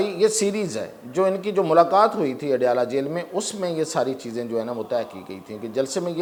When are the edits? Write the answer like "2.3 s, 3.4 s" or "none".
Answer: none